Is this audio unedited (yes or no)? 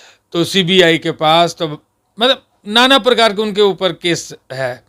yes